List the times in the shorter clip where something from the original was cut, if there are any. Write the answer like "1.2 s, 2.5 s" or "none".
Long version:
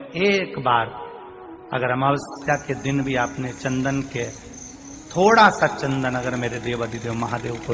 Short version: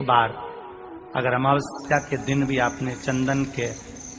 none